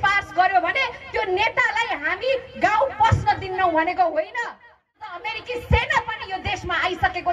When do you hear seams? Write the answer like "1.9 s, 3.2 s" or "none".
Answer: 5.2 s